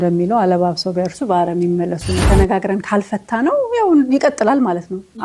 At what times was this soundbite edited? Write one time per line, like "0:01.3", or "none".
0:02.1